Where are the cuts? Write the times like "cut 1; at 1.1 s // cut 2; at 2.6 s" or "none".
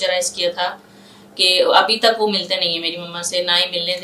none